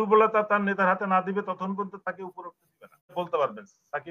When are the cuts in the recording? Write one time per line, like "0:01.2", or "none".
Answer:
0:03.1